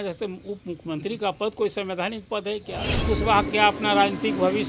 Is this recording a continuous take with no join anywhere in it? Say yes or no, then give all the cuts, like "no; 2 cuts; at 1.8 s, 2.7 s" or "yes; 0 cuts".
no; 1 cut; at 3.0 s